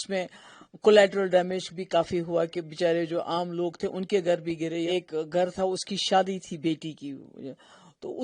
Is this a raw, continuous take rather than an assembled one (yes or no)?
no